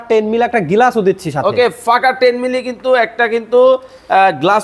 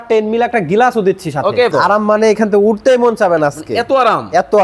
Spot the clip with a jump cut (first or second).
second